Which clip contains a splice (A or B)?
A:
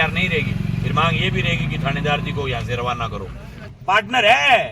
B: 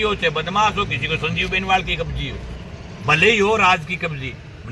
A